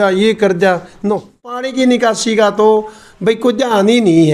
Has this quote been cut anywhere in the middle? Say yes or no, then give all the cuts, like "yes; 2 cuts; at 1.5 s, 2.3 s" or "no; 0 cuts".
yes; 1 cut; at 1.6 s